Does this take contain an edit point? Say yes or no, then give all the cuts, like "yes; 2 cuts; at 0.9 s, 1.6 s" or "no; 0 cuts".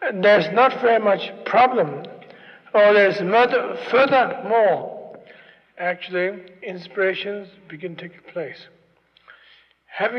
no; 0 cuts